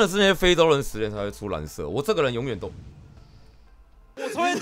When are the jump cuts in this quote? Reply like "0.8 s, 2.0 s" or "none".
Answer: none